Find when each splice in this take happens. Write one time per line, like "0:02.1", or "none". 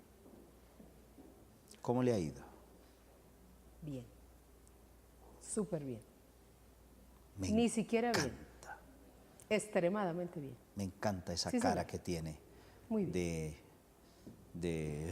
0:10.9